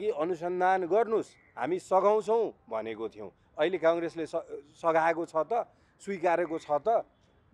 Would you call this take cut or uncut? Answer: uncut